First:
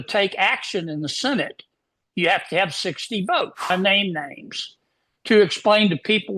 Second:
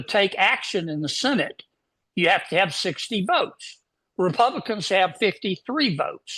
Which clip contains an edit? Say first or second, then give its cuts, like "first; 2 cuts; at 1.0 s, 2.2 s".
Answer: first; 1 cut; at 3.7 s